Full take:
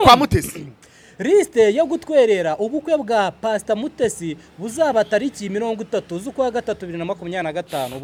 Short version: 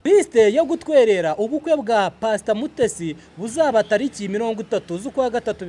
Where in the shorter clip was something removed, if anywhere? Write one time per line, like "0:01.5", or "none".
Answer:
none